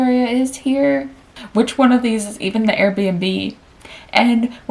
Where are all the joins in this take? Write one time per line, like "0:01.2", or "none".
0:01.3